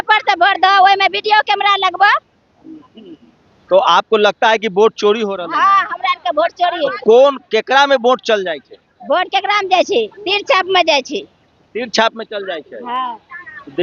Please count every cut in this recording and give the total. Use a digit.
0